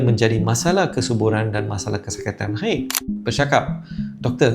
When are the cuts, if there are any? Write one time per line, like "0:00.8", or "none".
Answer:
0:03.0